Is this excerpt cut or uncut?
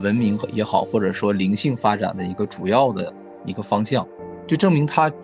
uncut